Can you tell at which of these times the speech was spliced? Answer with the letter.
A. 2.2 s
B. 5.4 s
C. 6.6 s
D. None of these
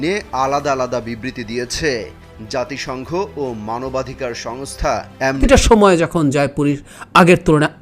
B